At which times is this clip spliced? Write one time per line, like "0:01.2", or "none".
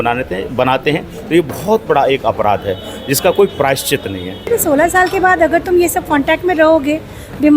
0:04.4